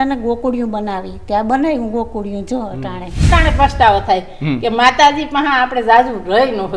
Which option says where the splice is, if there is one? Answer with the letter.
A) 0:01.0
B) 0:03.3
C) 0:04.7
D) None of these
B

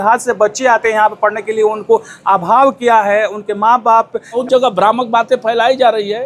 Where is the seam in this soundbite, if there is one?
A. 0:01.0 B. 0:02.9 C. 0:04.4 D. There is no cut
C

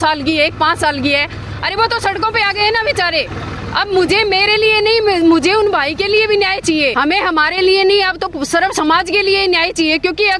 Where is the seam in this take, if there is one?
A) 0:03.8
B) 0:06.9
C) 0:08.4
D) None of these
B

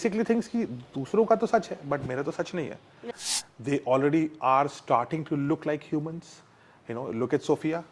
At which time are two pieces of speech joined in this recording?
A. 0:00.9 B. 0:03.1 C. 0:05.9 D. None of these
B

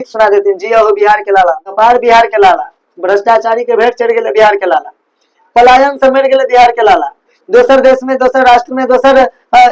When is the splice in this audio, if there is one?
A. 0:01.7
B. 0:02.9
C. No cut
A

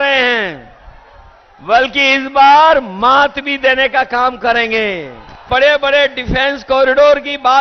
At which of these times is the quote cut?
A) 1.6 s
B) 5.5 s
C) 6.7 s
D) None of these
B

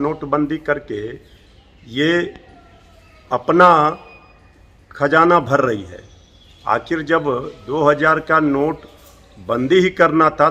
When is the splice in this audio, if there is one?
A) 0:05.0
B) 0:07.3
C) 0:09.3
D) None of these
D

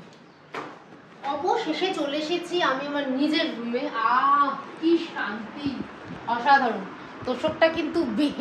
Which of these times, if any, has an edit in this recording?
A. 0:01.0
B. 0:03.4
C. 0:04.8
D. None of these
A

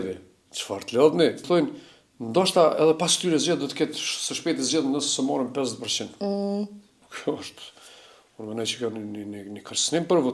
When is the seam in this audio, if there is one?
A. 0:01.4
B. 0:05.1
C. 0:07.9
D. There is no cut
A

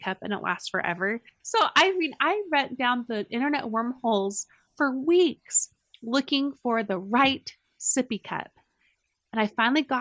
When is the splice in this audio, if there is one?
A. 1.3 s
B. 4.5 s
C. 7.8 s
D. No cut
A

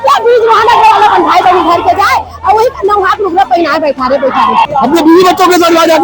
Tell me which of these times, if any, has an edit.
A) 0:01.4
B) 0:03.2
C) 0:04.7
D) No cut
C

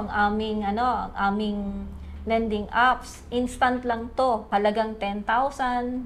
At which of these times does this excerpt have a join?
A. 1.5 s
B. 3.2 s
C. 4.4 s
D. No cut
C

